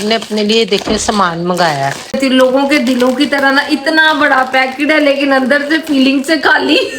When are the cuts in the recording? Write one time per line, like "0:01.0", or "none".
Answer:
0:02.2